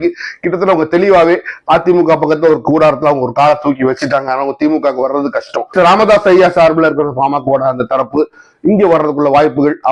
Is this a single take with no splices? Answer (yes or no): yes